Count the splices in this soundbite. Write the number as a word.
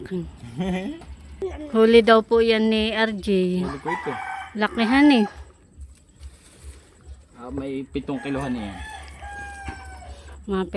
one